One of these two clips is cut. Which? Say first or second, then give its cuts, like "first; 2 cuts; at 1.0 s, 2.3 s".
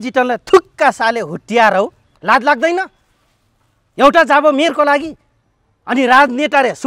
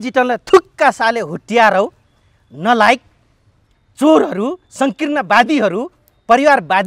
first; 1 cut; at 2.1 s